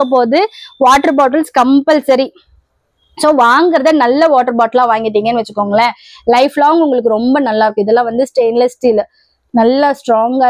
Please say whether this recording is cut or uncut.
uncut